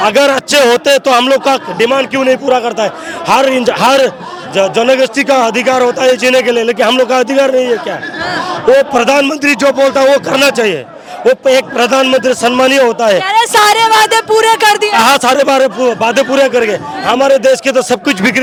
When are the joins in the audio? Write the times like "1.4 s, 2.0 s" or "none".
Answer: none